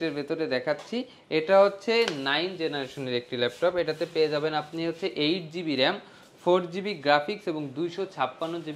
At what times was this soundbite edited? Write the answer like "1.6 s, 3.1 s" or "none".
none